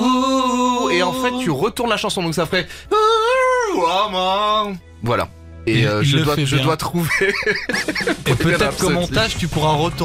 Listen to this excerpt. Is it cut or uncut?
uncut